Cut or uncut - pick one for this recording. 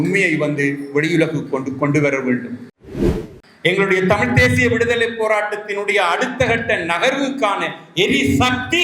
cut